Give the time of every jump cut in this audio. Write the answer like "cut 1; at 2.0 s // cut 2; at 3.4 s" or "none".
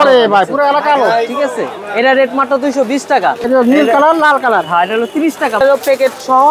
cut 1; at 3.4 s // cut 2; at 5.6 s